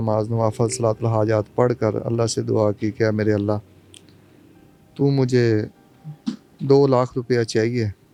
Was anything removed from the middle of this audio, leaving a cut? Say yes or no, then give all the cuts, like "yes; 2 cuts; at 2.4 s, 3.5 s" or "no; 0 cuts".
no; 0 cuts